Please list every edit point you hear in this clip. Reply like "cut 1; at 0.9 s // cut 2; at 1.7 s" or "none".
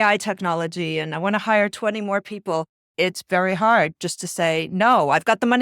cut 1; at 2.8 s